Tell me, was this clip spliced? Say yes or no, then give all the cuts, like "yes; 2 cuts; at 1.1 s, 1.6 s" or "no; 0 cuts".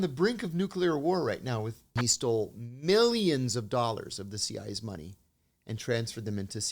yes; 1 cut; at 1.8 s